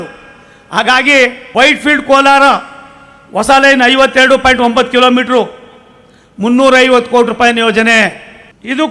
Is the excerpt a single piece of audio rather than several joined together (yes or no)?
no